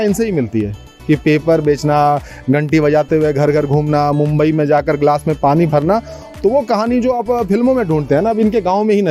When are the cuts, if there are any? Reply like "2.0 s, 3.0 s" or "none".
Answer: none